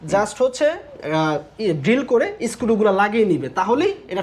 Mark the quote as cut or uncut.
uncut